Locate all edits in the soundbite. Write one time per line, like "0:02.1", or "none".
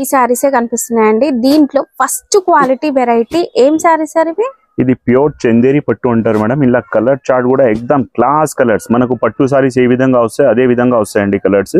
none